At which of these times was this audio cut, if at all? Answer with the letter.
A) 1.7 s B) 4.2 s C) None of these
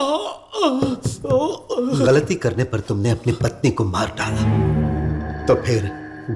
C